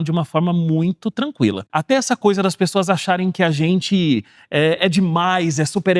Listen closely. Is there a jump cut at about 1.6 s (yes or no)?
yes